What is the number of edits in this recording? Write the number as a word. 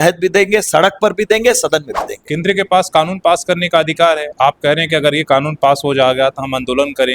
one